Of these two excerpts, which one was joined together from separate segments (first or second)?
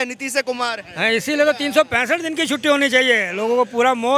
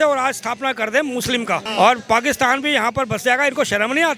second